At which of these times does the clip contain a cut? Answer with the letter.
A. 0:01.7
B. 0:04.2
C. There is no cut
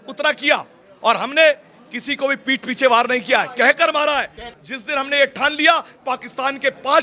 C